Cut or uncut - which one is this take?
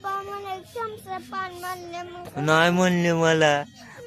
uncut